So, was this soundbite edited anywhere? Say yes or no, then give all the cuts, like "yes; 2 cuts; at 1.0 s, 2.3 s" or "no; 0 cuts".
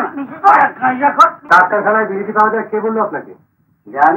yes; 1 cut; at 1.4 s